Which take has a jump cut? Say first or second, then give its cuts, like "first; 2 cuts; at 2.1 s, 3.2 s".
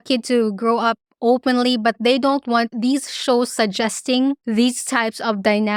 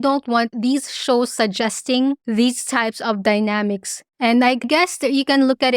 second; 1 cut; at 4.6 s